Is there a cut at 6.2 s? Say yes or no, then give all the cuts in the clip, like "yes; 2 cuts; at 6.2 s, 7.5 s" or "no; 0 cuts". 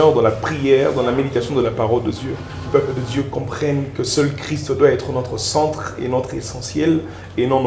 no; 1 cut; at 2.6 s